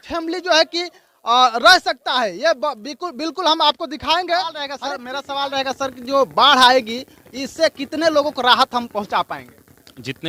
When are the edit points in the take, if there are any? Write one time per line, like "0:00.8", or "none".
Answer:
0:04.7

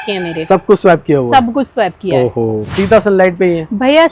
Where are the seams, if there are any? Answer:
0:02.7

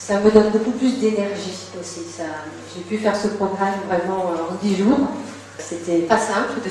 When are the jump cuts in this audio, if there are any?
0:01.2

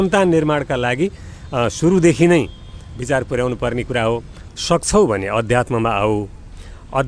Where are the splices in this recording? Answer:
0:04.4

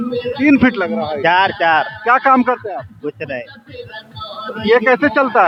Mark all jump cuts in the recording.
none

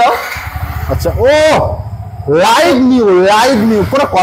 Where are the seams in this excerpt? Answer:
none

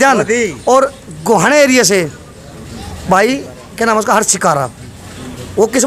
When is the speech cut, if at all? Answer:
none

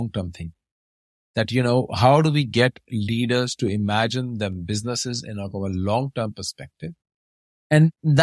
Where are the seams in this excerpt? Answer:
none

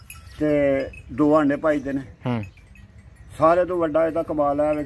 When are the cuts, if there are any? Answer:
none

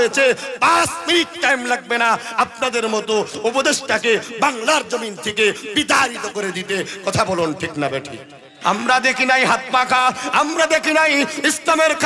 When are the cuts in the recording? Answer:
0:08.5

